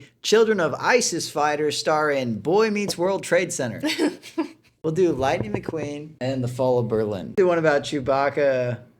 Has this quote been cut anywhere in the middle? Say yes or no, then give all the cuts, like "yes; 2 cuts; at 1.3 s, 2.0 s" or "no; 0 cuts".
yes; 3 cuts; at 4.7 s, 6.0 s, 7.3 s